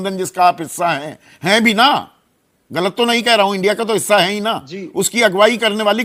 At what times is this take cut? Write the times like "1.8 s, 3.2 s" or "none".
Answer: none